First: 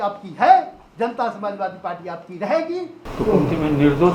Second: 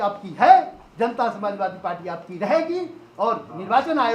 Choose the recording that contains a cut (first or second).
first